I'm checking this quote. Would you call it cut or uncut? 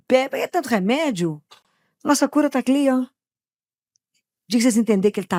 uncut